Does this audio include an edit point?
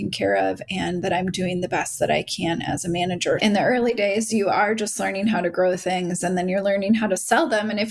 yes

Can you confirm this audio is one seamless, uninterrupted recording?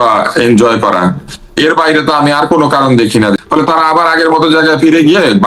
no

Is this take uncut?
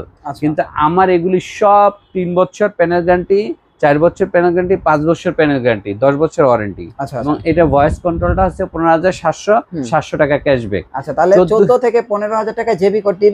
no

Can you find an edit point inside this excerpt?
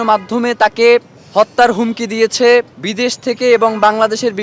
yes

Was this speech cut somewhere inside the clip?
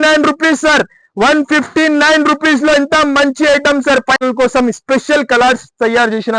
yes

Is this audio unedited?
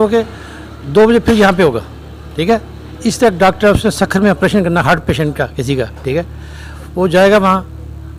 yes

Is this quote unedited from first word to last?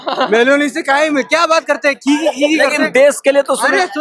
yes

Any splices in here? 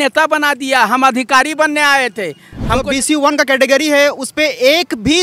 yes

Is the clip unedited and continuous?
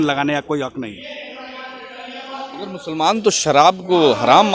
yes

